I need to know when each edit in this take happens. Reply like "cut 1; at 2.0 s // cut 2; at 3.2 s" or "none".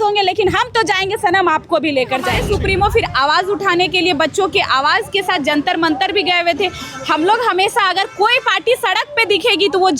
cut 1; at 2.4 s